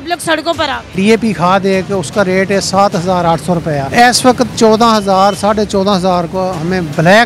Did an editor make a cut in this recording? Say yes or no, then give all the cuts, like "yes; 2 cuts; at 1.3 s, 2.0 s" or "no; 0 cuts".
yes; 2 cuts; at 0.9 s, 3.9 s